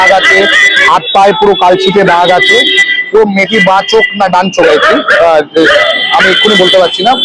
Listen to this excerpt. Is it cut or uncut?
uncut